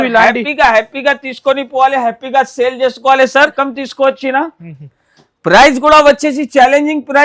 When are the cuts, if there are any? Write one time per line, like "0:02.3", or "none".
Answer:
0:03.4